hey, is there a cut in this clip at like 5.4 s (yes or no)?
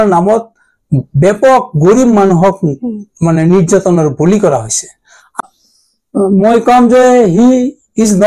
yes